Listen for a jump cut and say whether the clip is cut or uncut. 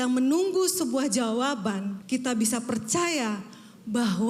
cut